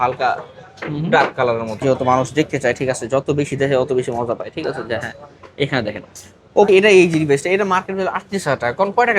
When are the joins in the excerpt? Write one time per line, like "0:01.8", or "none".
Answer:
0:01.8
0:06.7